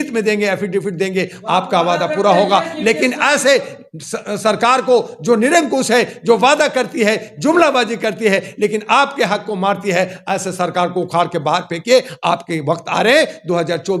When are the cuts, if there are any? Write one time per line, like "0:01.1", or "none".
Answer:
none